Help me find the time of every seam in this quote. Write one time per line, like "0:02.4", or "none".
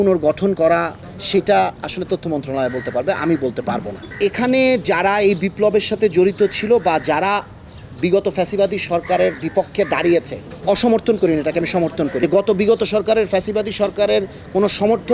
0:01.0
0:04.0
0:10.5
0:12.2